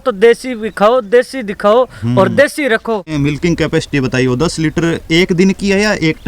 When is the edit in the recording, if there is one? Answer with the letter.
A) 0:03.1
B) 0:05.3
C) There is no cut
A